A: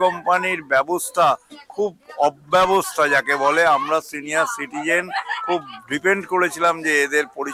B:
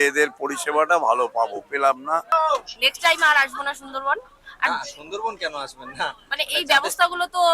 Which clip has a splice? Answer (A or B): B